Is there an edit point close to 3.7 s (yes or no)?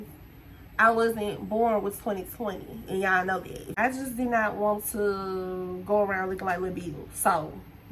yes